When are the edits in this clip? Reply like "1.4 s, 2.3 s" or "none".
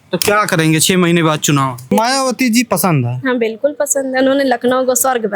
1.9 s